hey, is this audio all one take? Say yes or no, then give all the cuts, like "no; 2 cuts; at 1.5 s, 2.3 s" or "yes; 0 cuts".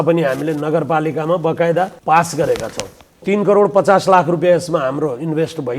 no; 2 cuts; at 2.0 s, 3.2 s